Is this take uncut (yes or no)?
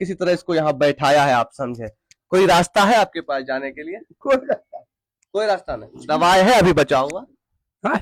yes